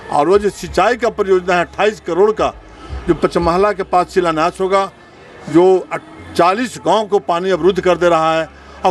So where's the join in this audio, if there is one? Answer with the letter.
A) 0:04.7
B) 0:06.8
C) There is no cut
C